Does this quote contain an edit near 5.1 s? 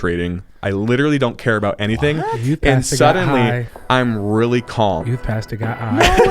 yes; 1 cut; at 5.1 s

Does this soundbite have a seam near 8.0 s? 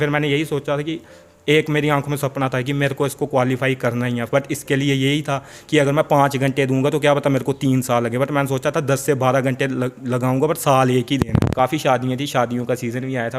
no; 1 cut; at 11.5 s

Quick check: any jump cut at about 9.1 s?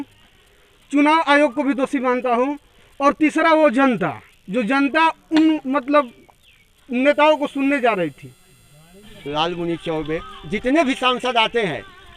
yes; 1 cut; at 9.1 s

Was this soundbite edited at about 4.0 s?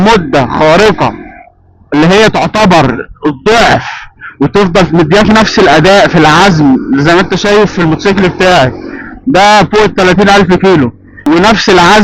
no; 1 cut; at 11.1 s

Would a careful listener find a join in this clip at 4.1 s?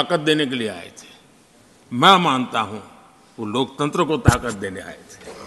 no; 0 cuts

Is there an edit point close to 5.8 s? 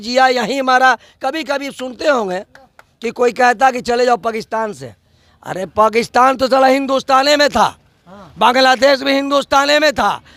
no; 0 cuts

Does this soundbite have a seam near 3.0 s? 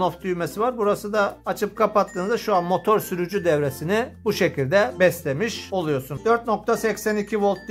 no; 1 cut; at 6.1 s

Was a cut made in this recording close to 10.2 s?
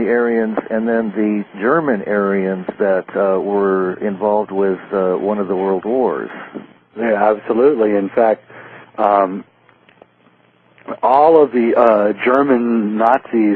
no; 1 cut; at 2.1 s

